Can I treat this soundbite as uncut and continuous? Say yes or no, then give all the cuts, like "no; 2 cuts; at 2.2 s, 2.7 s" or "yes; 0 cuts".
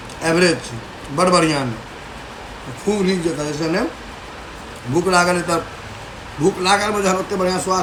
yes; 0 cuts